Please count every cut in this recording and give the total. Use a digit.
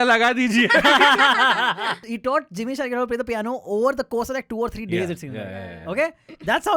1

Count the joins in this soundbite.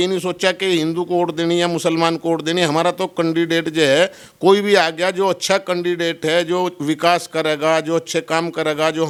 0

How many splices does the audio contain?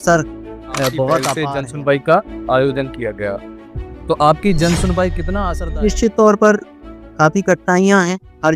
2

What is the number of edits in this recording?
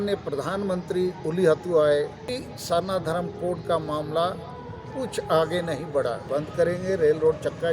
2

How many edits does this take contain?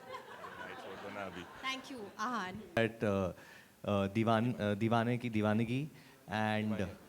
1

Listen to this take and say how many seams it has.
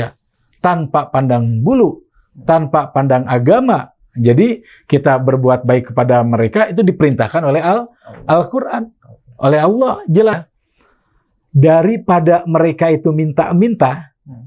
1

